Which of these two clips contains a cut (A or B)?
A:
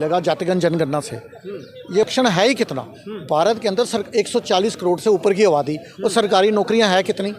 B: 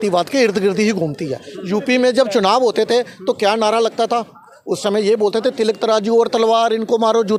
A